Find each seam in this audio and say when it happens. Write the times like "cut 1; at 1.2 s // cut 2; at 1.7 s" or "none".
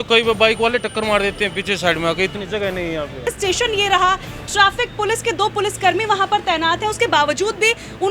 cut 1; at 3.3 s

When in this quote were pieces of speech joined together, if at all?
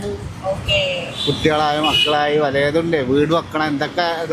none

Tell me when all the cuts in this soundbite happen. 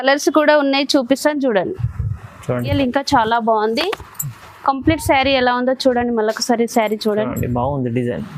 cut 1; at 2.7 s

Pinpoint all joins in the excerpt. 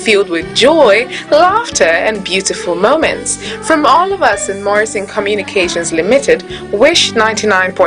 cut 1; at 1.7 s

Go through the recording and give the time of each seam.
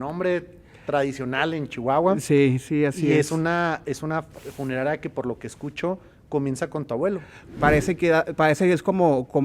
cut 1; at 7.3 s

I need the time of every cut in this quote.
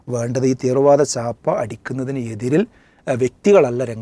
none

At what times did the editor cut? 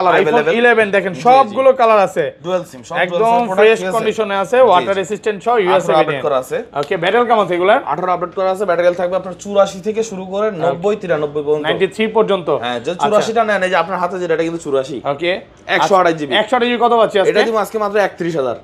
none

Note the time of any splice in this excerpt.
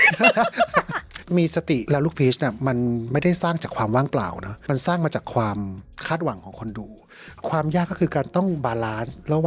cut 1; at 1.2 s // cut 2; at 7.3 s

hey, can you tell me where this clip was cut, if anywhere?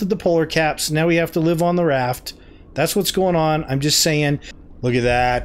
cut 1; at 4.6 s

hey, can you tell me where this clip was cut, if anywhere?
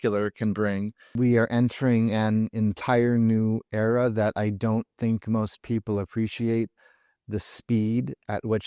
cut 1; at 1.0 s

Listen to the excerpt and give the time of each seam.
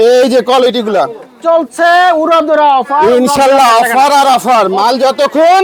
none

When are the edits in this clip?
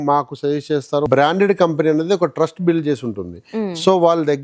cut 1; at 1.1 s

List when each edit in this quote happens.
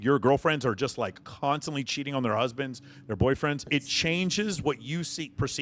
cut 1; at 1.2 s // cut 2; at 3.7 s

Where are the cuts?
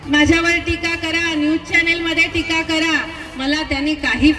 none

